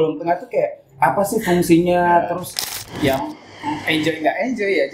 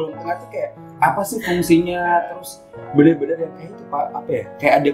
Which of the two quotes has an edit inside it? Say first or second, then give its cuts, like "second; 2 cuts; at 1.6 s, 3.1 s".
first; 1 cut; at 2.8 s